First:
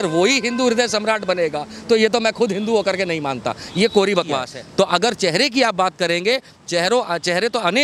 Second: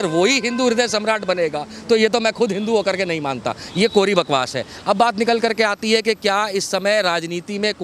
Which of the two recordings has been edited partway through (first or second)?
first